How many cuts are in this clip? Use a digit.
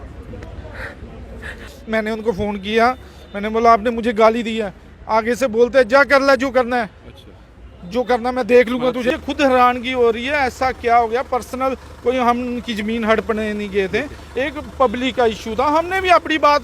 2